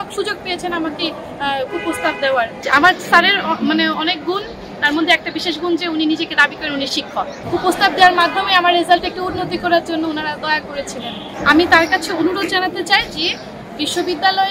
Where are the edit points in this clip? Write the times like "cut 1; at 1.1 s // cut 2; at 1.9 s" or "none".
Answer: cut 1; at 2.6 s // cut 2; at 7.4 s // cut 3; at 11.2 s